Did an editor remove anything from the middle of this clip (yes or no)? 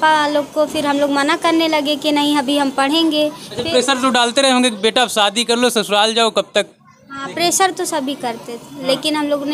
no